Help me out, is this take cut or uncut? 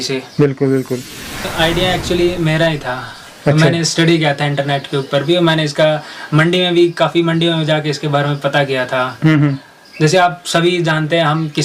cut